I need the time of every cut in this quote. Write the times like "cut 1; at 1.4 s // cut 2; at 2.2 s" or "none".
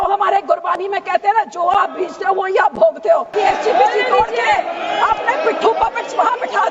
cut 1; at 3.3 s

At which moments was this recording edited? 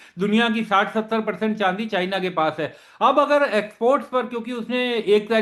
none

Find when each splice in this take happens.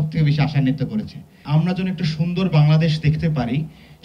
cut 1; at 1.4 s

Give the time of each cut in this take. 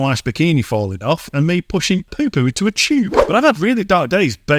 cut 1; at 3.2 s

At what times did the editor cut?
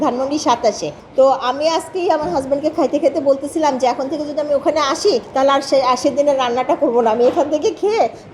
cut 1; at 1.0 s // cut 2; at 5.3 s

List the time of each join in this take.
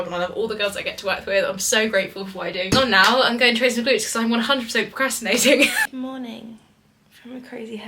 cut 1; at 2.7 s // cut 2; at 5.8 s

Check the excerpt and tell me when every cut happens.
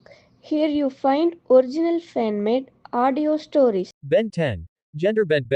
cut 1; at 4.0 s

